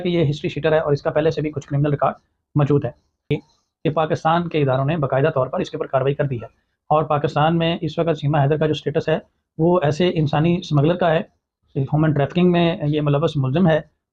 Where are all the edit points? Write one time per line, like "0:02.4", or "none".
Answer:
0:03.3